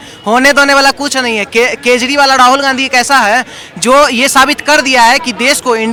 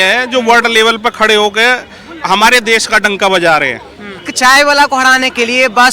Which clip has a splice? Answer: second; 1 cut; at 4.3 s

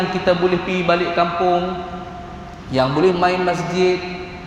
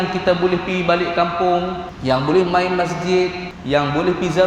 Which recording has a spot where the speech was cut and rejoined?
second; 2 cuts; at 1.9 s, 3.5 s

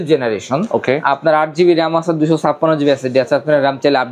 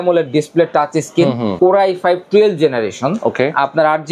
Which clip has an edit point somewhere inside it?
second; 1 cut; at 1.5 s

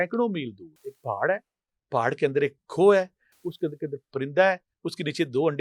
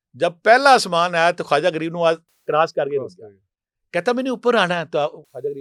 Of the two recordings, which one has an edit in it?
first; 1 cut; at 0.9 s

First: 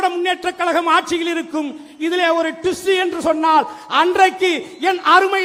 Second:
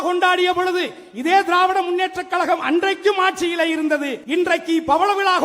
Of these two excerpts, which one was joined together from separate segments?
second; 1 cut; at 4.2 s

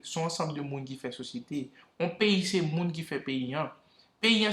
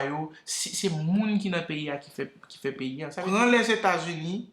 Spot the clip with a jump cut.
second; 1 cut; at 3.2 s

